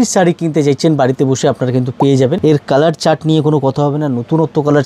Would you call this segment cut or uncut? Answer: cut